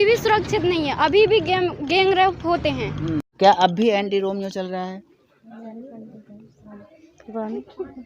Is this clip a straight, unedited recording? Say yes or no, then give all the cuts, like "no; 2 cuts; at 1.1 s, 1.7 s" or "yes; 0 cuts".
no; 1 cut; at 3.3 s